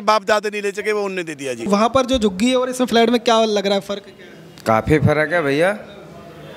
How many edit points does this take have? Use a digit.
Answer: 0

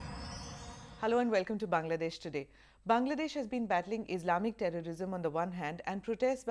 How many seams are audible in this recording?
2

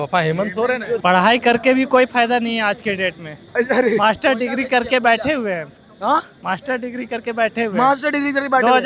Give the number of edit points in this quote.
1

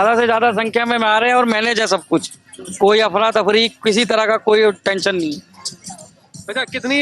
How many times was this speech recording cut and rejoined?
0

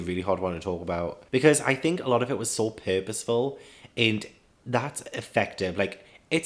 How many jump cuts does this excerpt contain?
0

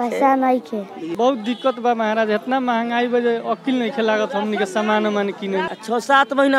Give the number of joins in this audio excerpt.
2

